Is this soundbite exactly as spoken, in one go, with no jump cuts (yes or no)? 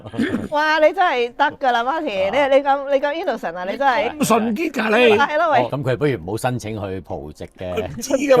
no